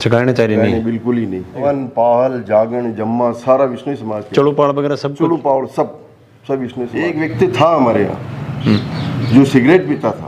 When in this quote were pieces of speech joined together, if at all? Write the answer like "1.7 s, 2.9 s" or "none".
1.6 s, 7.0 s

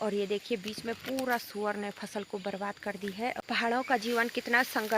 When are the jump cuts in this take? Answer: 3.4 s

